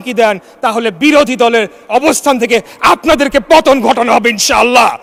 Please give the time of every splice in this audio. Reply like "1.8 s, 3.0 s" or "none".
none